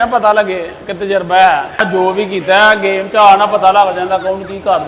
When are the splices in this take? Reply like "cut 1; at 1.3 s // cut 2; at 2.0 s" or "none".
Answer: cut 1; at 1.8 s